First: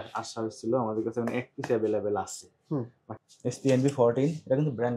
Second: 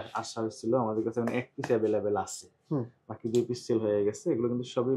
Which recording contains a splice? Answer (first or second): first